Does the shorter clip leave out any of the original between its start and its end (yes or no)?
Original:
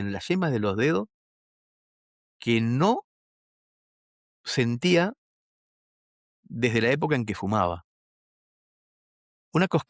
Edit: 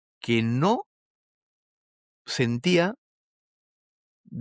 no